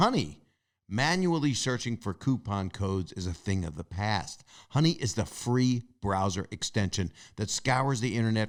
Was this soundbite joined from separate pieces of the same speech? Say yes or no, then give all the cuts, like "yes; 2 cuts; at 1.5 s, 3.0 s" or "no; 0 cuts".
no; 0 cuts